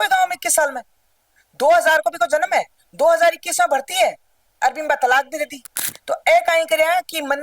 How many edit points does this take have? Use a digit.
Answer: 1